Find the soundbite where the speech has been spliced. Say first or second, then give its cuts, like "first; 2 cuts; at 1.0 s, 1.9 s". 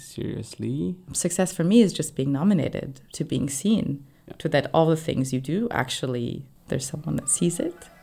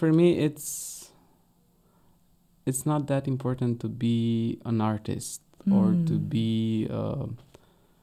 first; 1 cut; at 1.1 s